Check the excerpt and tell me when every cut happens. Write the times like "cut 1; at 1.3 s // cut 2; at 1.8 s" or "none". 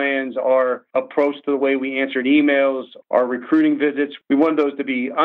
cut 1; at 0.8 s // cut 2; at 2.9 s // cut 3; at 4.2 s